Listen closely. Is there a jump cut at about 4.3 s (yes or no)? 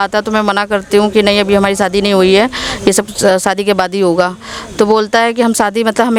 no